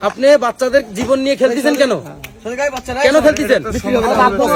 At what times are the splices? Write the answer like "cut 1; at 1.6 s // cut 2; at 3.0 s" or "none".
none